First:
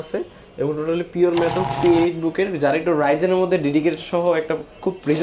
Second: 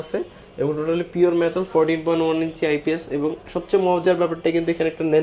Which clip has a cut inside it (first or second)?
first